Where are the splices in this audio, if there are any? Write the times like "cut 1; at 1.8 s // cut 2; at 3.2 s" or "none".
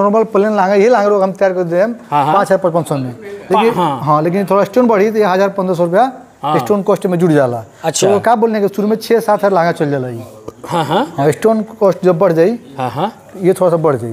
none